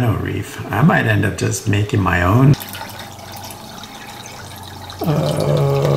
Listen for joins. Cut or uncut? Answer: cut